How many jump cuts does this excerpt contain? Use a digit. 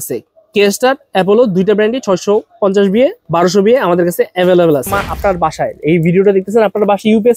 1